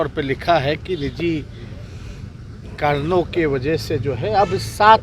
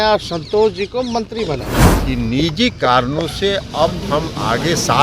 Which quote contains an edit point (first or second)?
second